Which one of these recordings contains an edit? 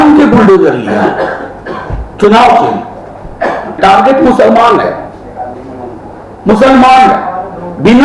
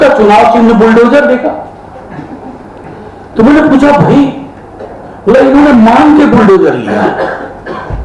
first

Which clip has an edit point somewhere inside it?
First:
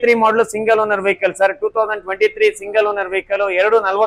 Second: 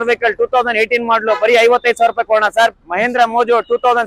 second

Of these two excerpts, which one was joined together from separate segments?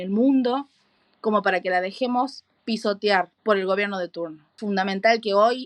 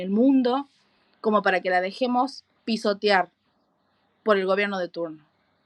first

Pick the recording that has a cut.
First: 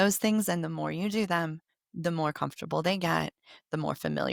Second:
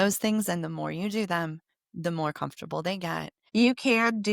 second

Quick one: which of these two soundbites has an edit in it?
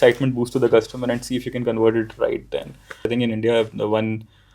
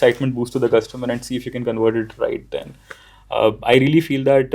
first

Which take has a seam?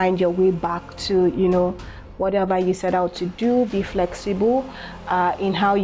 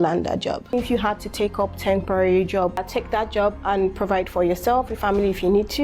second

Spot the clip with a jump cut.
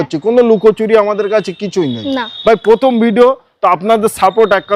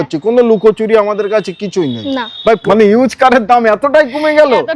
second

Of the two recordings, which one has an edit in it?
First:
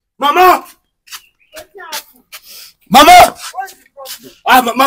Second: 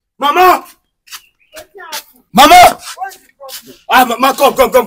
second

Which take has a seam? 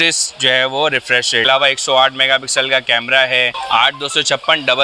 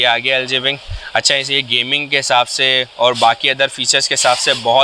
first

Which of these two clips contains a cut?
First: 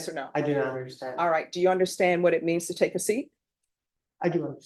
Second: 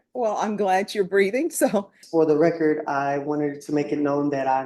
second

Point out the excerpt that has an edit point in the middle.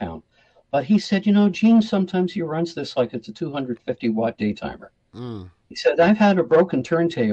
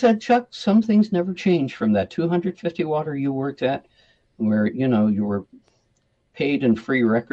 second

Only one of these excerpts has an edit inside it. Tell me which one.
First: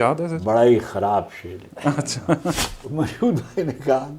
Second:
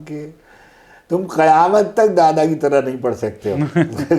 first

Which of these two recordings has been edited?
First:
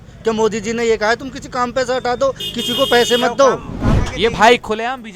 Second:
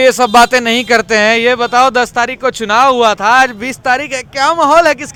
first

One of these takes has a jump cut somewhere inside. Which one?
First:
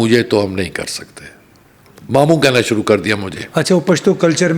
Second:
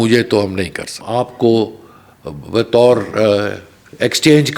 second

